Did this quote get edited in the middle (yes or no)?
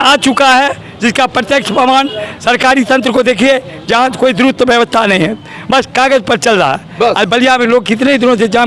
no